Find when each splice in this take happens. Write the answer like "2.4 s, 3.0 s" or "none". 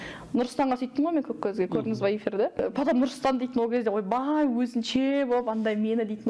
2.5 s